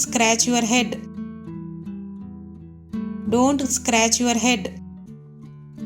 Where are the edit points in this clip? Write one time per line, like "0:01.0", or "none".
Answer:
0:01.1
0:03.2
0:05.0